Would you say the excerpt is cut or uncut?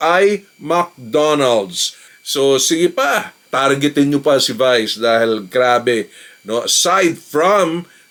uncut